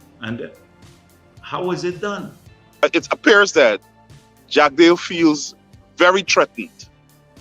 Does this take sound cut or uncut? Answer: cut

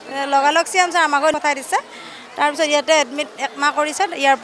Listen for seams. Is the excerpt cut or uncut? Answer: uncut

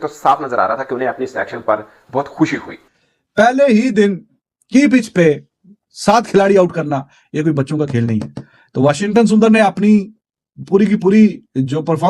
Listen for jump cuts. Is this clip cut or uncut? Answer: cut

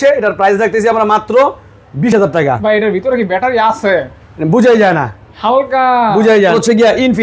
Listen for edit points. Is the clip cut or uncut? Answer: uncut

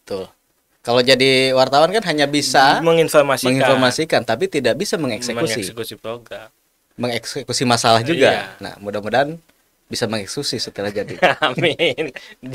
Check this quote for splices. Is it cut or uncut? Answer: uncut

